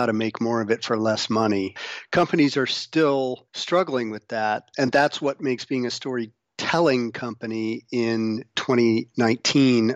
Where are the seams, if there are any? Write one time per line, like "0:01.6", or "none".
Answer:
0:01.8
0:03.5
0:04.7
0:08.5